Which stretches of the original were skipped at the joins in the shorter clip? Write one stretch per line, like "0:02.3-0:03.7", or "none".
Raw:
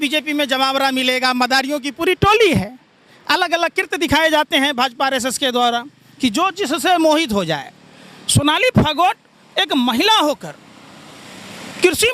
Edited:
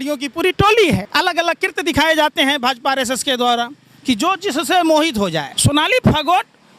0:02.7-0:03.2
0:07.6-0:08.2